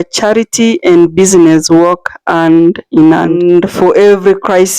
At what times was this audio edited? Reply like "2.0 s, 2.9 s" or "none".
3.4 s